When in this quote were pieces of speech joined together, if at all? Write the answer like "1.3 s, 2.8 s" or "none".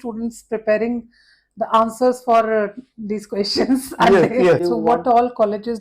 4.6 s